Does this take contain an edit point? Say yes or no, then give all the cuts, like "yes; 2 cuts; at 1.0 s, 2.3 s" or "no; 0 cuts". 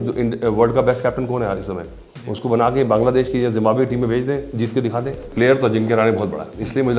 yes; 1 cut; at 5.3 s